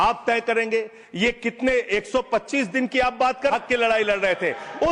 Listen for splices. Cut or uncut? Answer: cut